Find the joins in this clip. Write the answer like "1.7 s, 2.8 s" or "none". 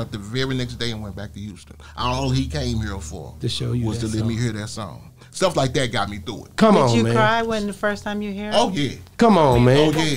none